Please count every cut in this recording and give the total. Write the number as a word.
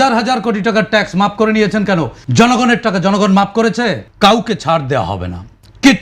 two